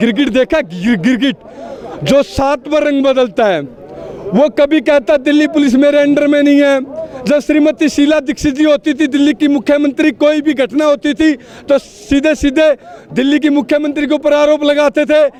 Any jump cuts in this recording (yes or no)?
no